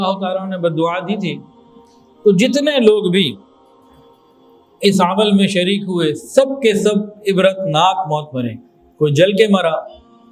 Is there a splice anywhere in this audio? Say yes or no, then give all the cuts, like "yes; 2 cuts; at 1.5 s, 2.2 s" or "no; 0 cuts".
no; 0 cuts